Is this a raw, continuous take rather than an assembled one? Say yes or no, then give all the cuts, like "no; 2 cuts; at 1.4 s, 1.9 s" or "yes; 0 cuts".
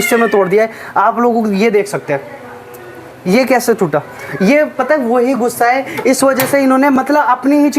yes; 0 cuts